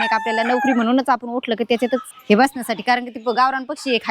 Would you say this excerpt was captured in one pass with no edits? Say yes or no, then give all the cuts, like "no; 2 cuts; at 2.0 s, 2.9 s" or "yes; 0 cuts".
no; 1 cut; at 2.1 s